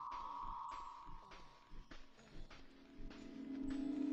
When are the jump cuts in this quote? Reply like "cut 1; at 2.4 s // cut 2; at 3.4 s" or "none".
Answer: none